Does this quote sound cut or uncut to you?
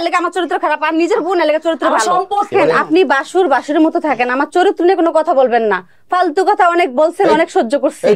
cut